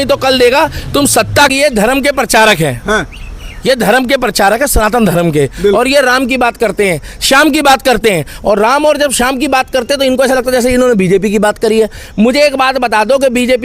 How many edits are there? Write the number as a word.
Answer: one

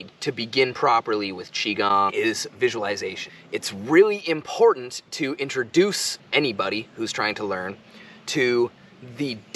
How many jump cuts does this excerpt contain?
one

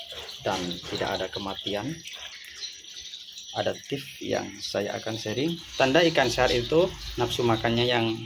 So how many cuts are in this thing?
one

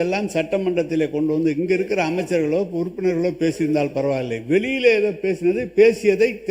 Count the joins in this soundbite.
zero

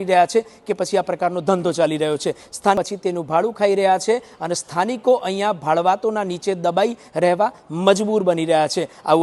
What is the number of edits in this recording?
one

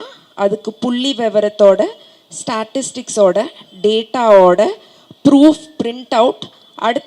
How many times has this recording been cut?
zero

